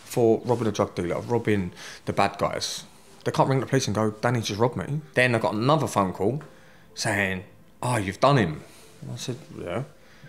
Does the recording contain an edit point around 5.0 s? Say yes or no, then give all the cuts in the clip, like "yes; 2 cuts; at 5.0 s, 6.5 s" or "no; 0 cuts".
yes; 1 cut; at 5.0 s